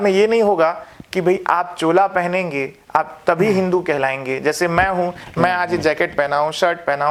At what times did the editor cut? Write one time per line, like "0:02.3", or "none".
none